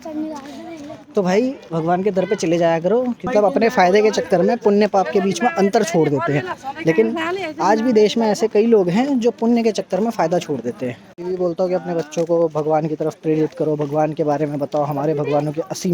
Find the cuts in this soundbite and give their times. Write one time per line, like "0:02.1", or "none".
0:03.3
0:11.2